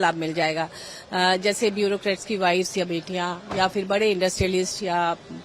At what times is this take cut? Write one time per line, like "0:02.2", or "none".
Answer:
none

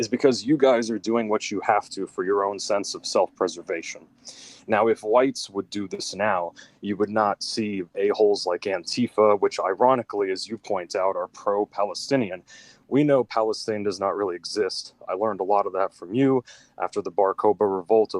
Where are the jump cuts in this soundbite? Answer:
none

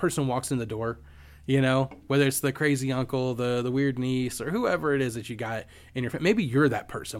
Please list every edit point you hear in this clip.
none

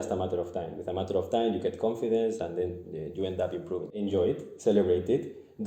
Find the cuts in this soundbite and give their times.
0:03.9

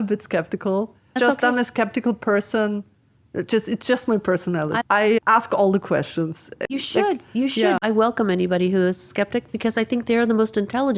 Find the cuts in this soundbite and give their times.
0:01.1
0:04.8
0:06.6
0:07.8

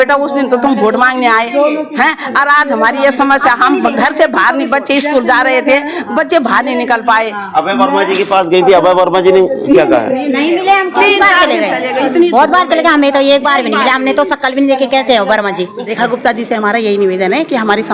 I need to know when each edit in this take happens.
0:15.7

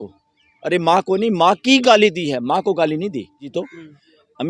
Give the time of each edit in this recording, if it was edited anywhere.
0:03.5

